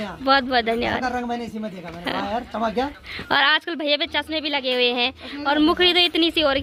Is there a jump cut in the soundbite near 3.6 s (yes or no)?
no